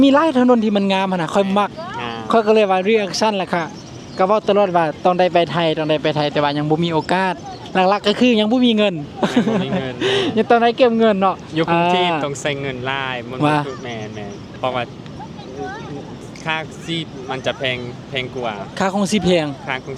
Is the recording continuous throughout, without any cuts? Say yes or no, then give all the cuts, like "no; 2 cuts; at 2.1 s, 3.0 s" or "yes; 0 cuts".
yes; 0 cuts